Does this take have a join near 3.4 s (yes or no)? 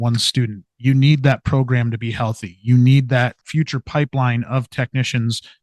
yes